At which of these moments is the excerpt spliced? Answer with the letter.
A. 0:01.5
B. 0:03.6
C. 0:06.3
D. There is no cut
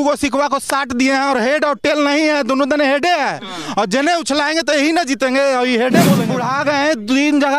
C